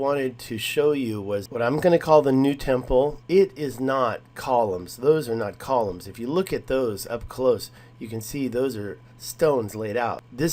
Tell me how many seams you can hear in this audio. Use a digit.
1